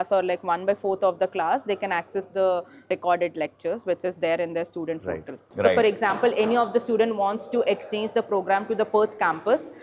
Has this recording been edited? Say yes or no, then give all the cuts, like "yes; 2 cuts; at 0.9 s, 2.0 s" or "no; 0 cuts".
yes; 1 cut; at 5.4 s